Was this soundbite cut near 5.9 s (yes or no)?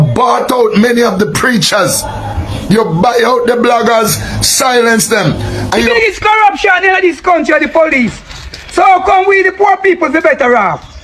yes